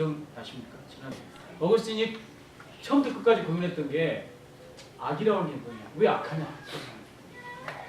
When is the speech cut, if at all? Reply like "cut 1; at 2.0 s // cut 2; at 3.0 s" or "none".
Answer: cut 1; at 1.3 s